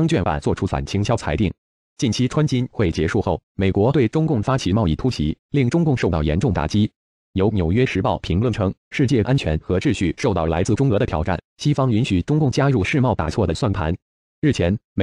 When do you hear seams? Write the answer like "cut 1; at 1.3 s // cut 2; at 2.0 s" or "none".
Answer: none